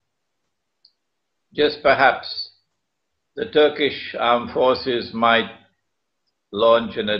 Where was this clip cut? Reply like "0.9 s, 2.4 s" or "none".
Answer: 2.8 s